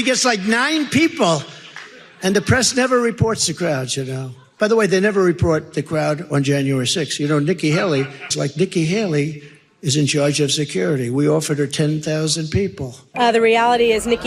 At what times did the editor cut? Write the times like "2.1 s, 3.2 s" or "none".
8.3 s, 13.0 s